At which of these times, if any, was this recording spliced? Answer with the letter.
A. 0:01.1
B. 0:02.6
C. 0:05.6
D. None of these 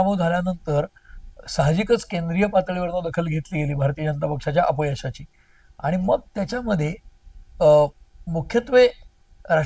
D